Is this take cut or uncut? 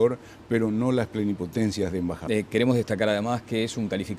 uncut